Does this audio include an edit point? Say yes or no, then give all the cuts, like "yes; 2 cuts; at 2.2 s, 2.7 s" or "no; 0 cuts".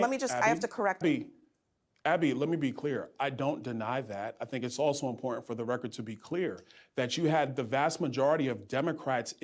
yes; 1 cut; at 1.0 s